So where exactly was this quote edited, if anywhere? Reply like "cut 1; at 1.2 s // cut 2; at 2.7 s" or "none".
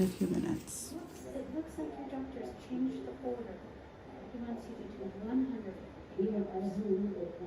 cut 1; at 1.1 s

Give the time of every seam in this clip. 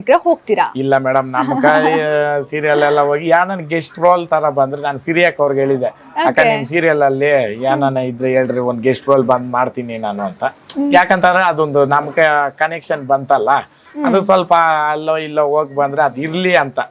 none

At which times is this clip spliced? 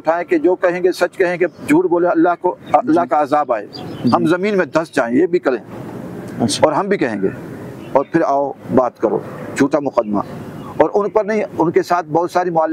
none

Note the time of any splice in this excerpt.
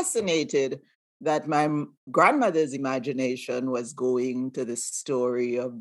none

